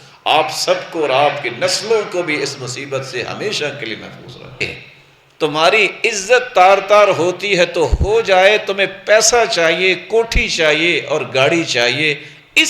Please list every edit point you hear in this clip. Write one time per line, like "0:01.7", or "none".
0:04.6